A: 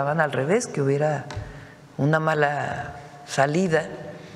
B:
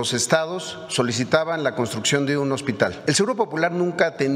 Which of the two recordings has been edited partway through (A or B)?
B